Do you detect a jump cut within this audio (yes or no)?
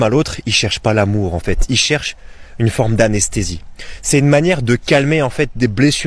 no